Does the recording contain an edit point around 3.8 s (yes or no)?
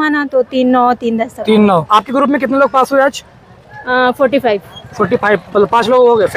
no